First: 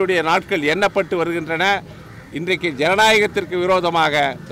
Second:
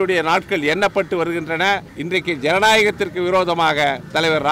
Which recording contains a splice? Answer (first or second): second